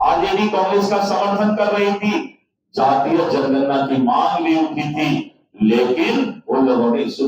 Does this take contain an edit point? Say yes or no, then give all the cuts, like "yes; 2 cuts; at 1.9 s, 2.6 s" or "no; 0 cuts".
no; 0 cuts